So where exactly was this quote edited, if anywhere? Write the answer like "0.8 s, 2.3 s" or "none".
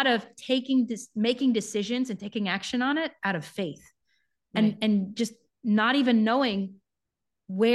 none